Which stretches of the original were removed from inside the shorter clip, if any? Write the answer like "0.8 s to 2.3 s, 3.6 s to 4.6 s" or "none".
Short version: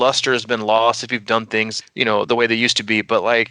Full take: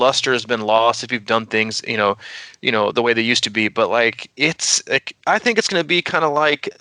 1.8 s to 2.5 s